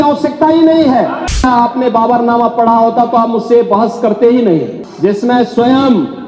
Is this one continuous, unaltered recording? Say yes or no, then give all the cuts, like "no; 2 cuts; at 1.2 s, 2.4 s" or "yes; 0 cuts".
no; 2 cuts; at 1.3 s, 4.8 s